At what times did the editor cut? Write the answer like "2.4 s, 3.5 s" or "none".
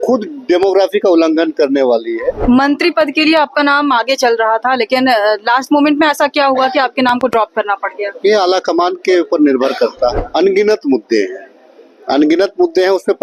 2.4 s, 10.2 s